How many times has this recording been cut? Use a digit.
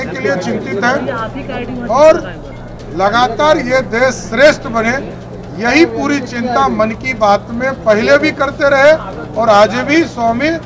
0